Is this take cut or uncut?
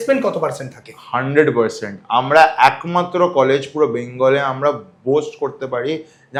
uncut